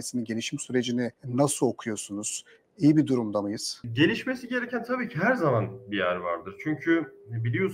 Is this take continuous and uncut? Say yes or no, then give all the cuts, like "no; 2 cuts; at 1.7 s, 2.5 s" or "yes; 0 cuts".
yes; 0 cuts